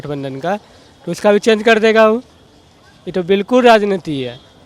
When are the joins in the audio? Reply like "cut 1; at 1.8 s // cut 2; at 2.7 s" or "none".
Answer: none